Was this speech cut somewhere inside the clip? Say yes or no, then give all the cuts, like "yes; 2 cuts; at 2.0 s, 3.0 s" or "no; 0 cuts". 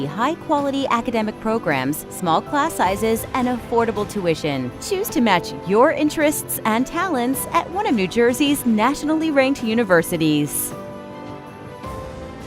yes; 1 cut; at 10.5 s